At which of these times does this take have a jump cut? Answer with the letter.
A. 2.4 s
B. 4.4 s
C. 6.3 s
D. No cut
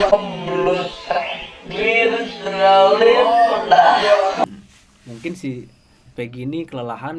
B